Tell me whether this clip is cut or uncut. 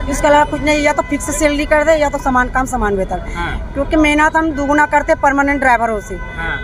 uncut